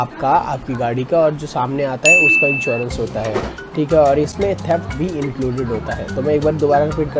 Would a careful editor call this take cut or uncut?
uncut